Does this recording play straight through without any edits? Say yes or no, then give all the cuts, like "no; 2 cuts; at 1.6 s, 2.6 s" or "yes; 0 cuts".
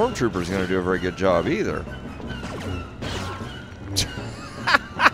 yes; 0 cuts